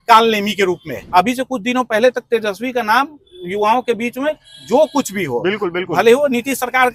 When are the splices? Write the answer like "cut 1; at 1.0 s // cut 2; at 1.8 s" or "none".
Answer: cut 1; at 0.9 s